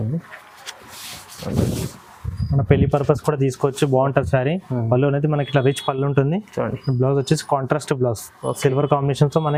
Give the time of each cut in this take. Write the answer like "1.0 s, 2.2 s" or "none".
none